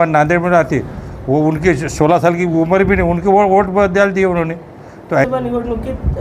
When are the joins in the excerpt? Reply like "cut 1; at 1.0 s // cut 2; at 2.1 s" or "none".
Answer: cut 1; at 5.2 s